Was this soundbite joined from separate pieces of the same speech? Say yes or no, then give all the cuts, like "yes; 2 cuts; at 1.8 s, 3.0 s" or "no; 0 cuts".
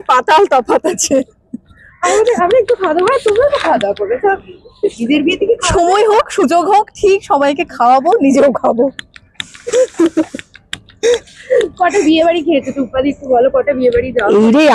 no; 0 cuts